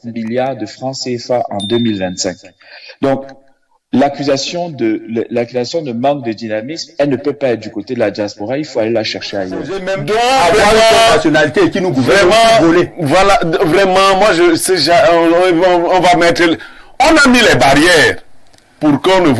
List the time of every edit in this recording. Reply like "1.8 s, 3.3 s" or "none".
9.9 s